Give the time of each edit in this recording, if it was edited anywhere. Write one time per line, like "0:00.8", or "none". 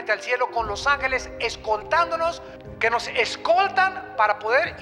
0:02.5